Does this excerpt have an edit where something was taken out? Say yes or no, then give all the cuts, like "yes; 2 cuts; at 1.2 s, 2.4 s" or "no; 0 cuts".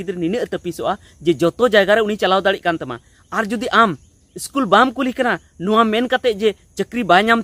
no; 0 cuts